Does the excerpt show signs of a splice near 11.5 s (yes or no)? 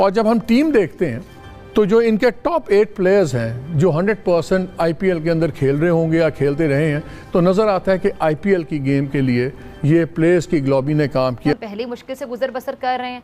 yes